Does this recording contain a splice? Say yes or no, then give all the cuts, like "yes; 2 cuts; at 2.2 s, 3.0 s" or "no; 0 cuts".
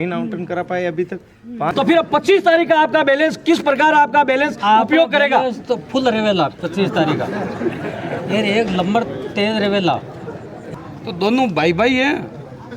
yes; 2 cuts; at 1.7 s, 10.7 s